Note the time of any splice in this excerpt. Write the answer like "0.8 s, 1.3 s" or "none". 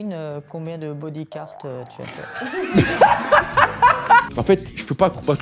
4.3 s